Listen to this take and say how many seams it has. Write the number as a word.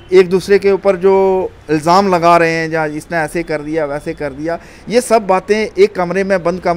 zero